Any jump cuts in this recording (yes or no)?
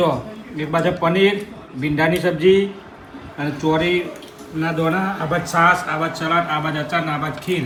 no